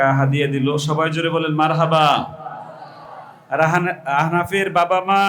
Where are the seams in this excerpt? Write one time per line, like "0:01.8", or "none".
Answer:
none